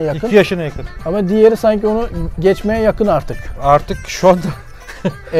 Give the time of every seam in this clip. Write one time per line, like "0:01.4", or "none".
none